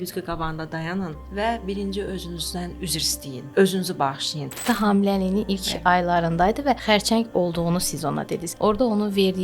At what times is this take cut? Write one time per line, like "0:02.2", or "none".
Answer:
0:01.2
0:02.9
0:04.6
0:06.8
0:08.4